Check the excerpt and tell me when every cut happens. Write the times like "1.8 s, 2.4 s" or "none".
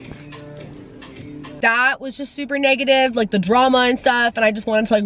1.6 s